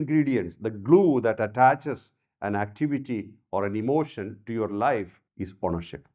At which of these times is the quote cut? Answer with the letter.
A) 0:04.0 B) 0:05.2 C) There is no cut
B